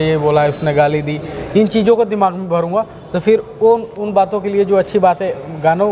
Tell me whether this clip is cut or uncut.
uncut